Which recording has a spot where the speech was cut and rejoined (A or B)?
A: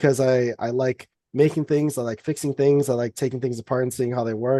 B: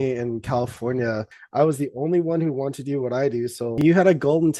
B